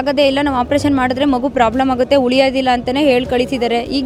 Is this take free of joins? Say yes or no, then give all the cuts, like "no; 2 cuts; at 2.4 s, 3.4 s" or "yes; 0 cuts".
yes; 0 cuts